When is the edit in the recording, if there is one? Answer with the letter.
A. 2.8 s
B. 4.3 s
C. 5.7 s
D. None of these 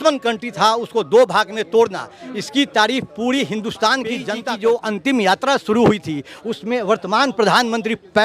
B